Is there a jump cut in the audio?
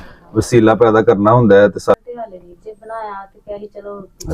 yes; 1 cut; at 2.0 s

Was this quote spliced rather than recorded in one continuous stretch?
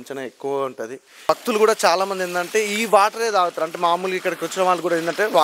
yes; 1 cut; at 1.2 s

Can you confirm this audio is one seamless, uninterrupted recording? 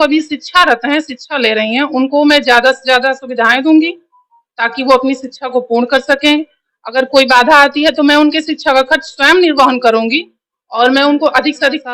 yes; 0 cuts

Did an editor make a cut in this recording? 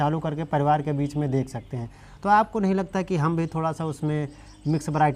no; 0 cuts

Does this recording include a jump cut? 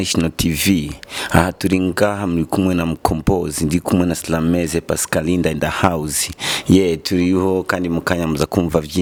no; 0 cuts

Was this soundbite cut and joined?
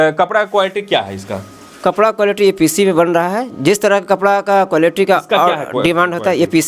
no; 0 cuts

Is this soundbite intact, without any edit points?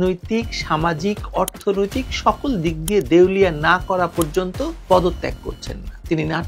yes; 0 cuts

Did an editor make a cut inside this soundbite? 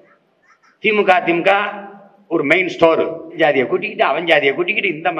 yes; 1 cut; at 3.4 s

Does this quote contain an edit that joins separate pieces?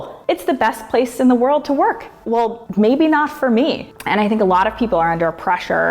yes; 2 cuts; at 2.2 s, 3.9 s

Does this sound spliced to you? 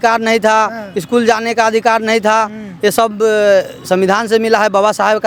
no; 0 cuts

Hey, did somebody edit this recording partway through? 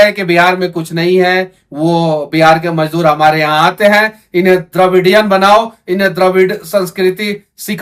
no; 0 cuts

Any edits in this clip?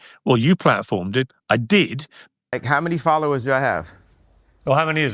yes; 1 cut; at 2.5 s

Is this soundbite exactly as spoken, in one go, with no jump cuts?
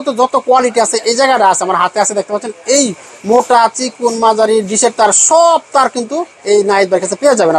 yes; 0 cuts

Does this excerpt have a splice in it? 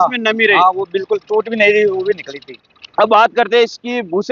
yes; 1 cut; at 2.5 s

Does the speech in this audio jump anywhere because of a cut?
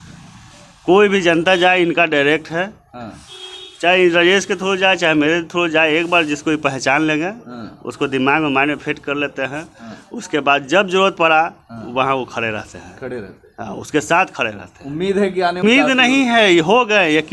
yes; 1 cut; at 15.6 s

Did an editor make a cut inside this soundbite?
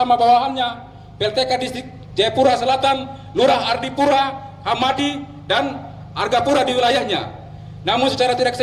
no; 0 cuts

